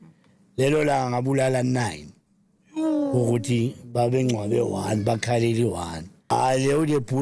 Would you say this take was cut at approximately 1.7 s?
no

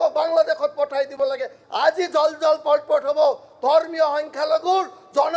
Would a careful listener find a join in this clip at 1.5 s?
yes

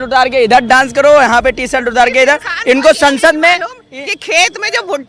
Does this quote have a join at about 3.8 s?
no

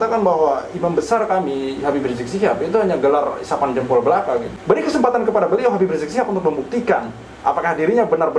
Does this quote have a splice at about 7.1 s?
no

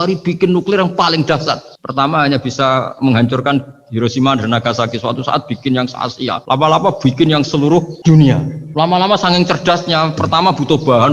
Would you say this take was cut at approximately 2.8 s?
no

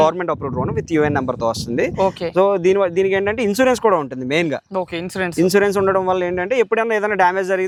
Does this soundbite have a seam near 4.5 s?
no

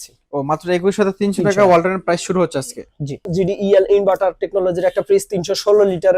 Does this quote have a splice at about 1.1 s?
no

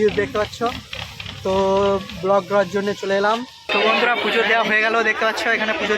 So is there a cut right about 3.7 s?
yes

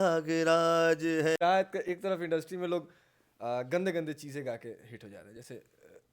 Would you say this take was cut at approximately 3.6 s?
no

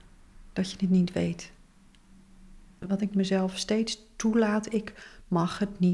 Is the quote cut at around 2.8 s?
yes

